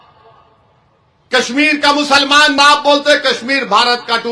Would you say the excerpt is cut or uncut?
cut